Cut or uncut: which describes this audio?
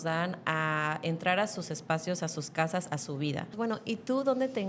cut